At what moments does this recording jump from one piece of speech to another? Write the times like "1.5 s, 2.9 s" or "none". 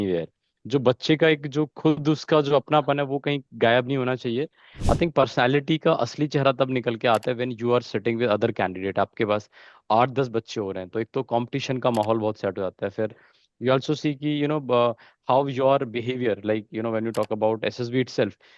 4.7 s